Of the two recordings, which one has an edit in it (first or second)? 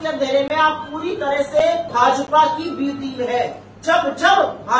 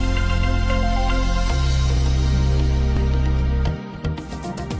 first